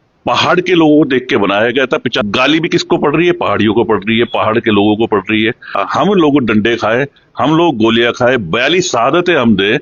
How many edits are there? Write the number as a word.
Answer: two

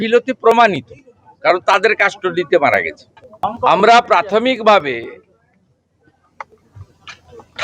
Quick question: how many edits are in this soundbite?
one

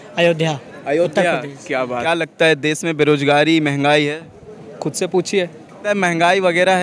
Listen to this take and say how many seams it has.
two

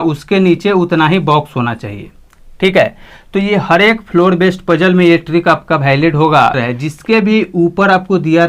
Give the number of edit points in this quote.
one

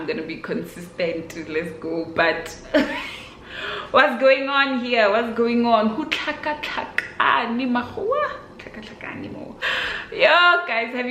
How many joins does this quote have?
one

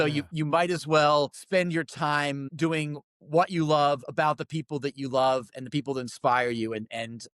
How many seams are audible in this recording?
two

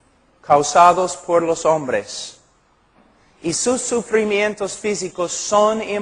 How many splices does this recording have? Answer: one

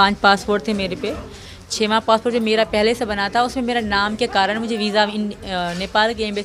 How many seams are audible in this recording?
zero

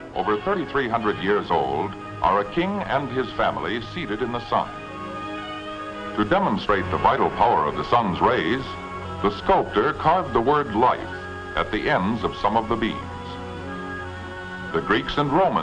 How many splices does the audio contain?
one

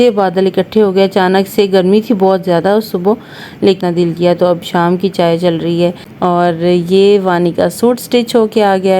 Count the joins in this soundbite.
two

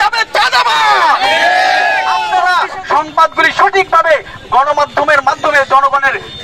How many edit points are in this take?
one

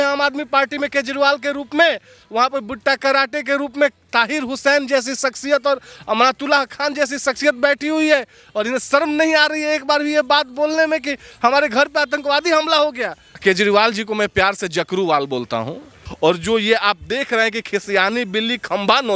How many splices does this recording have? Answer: two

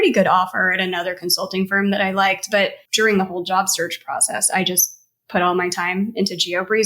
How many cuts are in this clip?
one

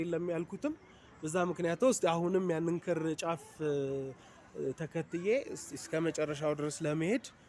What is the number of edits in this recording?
zero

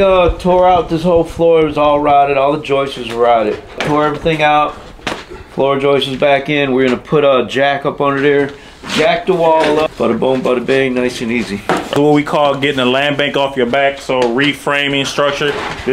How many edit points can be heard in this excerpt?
four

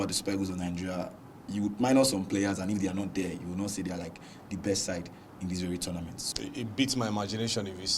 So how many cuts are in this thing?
one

